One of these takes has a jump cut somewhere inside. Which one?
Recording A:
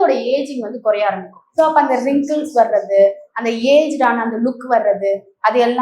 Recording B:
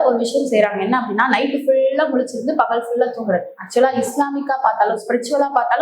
A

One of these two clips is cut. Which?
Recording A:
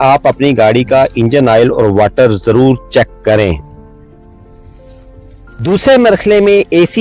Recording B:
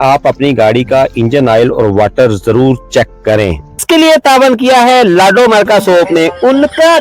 B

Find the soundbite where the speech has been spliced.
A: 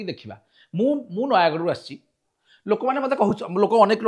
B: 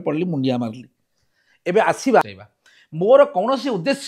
B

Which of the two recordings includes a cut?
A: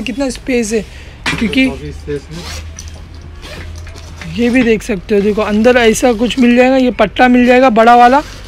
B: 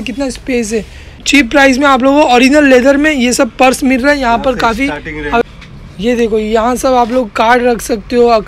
B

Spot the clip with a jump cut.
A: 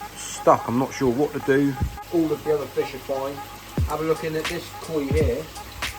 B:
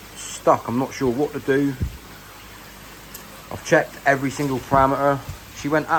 A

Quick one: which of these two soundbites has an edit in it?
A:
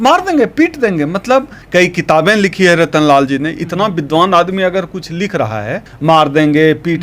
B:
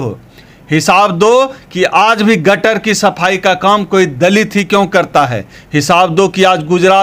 A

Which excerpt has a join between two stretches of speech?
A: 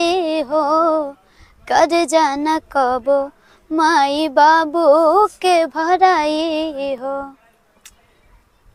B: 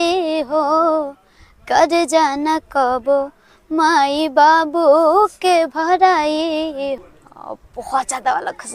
B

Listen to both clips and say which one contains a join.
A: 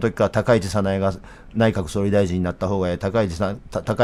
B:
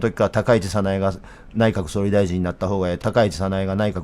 B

